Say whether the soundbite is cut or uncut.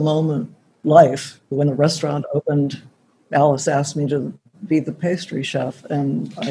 uncut